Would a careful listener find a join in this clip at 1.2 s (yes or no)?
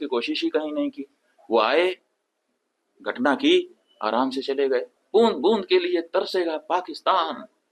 no